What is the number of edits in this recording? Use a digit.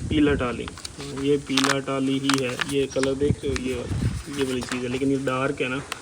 0